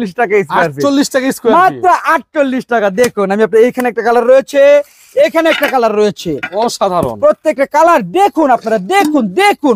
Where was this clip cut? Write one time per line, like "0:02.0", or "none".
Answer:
none

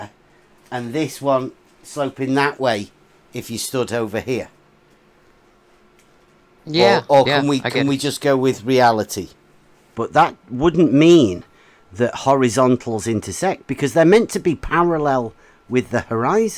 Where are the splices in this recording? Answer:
0:09.9

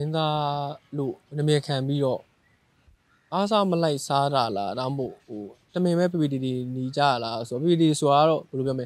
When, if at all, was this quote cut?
none

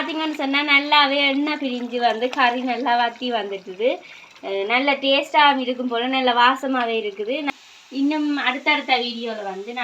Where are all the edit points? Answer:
0:07.5

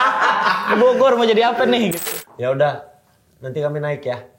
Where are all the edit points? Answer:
0:02.0

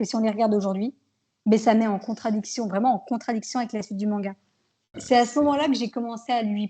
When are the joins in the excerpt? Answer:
0:05.0

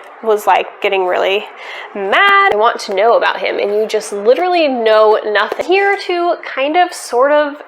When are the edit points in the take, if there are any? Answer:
0:02.5
0:05.6

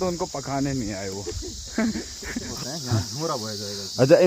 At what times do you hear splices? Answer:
0:02.5

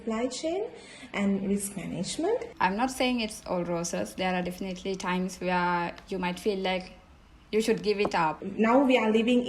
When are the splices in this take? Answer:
0:02.5
0:08.4

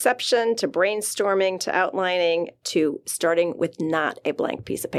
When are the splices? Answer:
none

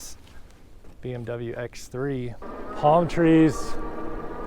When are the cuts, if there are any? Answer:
0:02.4

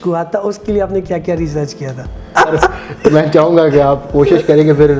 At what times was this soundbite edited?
0:02.3

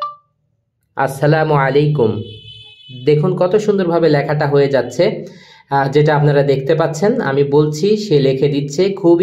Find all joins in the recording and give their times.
none

